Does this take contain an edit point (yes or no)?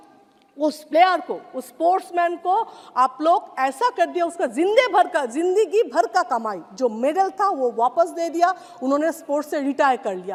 no